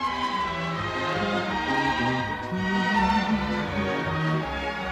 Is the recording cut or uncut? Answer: uncut